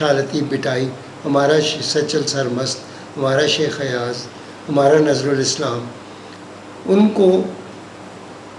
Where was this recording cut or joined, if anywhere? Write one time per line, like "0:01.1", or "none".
none